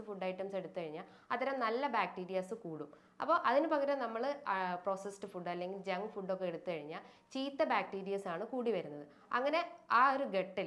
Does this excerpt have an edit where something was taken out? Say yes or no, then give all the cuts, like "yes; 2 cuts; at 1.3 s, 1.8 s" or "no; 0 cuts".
no; 0 cuts